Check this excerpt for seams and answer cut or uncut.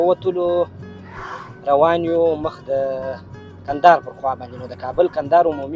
uncut